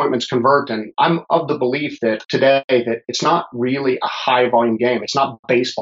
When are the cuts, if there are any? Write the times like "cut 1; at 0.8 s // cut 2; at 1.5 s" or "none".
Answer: cut 1; at 0.9 s // cut 2; at 2.2 s